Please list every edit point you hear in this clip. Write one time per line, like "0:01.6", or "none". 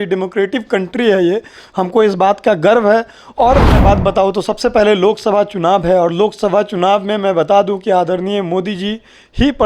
0:03.8